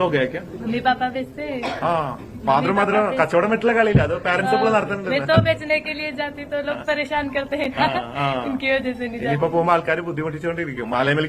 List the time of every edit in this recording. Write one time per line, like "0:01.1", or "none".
0:09.0